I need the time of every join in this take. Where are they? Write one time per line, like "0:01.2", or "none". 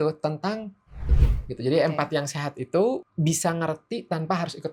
0:01.0
0:03.1